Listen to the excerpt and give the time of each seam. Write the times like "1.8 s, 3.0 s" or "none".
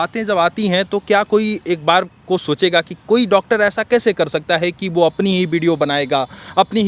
none